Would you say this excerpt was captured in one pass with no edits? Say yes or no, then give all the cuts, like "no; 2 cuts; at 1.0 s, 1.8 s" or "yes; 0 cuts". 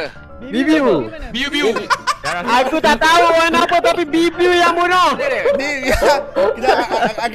no; 2 cuts; at 2.3 s, 5.2 s